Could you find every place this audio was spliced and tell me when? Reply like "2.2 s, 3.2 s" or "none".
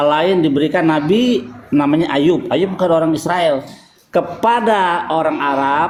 none

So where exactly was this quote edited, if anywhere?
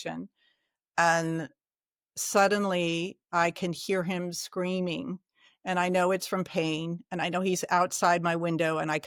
none

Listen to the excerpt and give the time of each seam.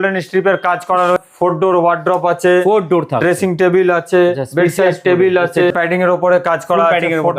1.2 s, 5.7 s

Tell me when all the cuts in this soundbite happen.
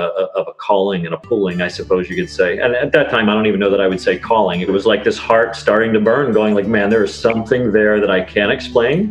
4.7 s

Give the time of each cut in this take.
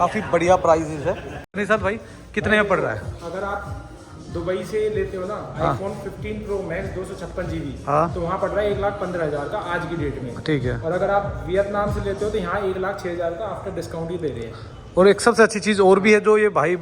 1.6 s

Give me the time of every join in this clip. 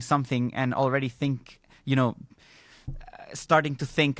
none

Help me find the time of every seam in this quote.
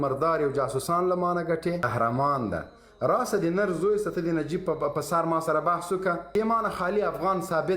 1.8 s, 6.2 s

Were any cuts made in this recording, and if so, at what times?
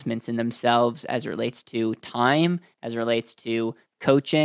none

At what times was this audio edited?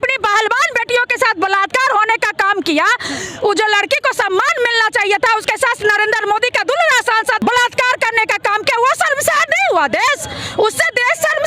7.4 s

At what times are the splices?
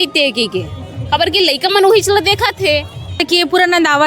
3.2 s

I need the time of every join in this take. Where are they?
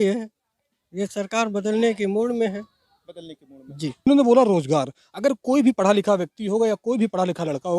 4.1 s

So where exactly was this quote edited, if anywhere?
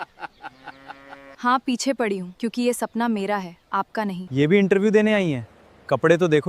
1.3 s, 2.3 s, 4.2 s

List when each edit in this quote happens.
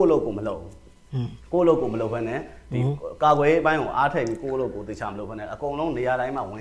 none

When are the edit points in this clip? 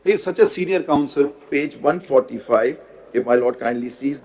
1.5 s

